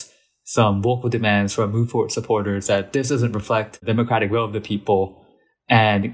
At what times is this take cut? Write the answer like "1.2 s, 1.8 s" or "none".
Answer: 3.9 s

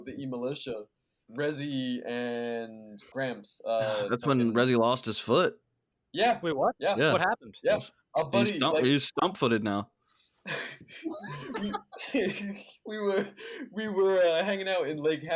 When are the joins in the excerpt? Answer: 1.2 s

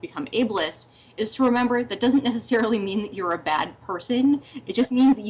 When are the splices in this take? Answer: none

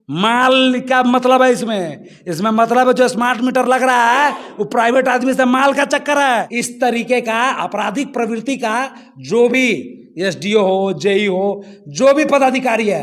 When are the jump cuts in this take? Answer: 6.6 s

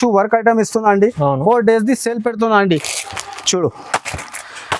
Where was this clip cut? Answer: 3.0 s

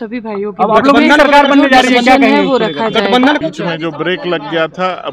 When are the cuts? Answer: 3.4 s

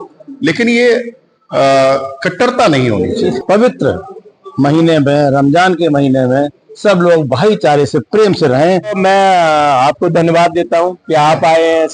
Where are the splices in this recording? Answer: 3.3 s, 9.0 s

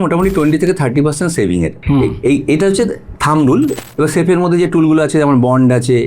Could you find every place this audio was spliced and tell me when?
1.8 s, 3.7 s

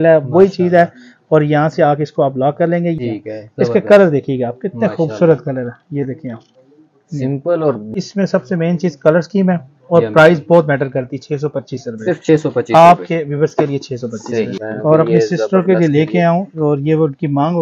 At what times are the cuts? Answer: 3.0 s, 7.9 s, 14.6 s

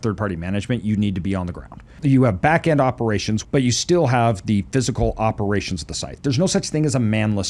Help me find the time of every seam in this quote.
2.0 s, 3.4 s

